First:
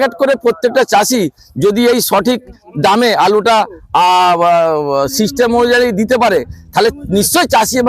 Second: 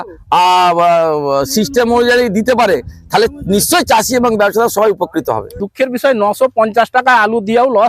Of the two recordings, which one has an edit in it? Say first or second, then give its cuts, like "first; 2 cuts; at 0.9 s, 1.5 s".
second; 1 cut; at 5.6 s